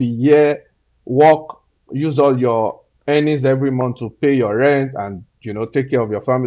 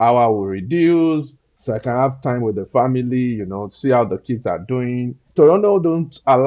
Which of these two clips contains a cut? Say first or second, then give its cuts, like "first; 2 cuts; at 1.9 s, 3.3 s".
second; 2 cuts; at 1.5 s, 5.2 s